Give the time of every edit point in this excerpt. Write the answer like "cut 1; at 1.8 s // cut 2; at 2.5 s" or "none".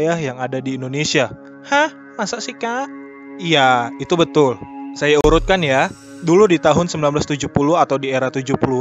none